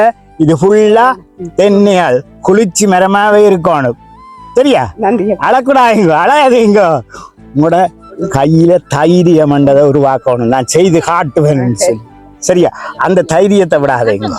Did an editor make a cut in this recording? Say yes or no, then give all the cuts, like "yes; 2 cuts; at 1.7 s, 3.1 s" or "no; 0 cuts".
no; 0 cuts